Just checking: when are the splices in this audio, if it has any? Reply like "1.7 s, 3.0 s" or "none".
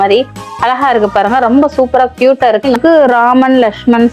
2.8 s